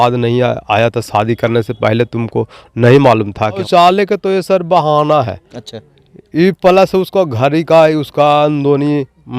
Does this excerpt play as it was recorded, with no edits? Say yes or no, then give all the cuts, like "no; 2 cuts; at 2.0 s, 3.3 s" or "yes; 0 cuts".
no; 1 cut; at 3.6 s